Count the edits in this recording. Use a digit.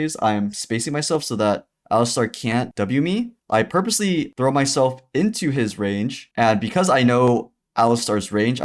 2